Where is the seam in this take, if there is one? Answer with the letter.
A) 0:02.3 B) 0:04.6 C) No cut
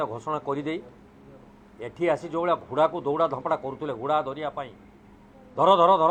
C